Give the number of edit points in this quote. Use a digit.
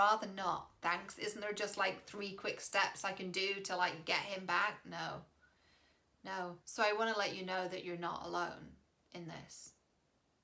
1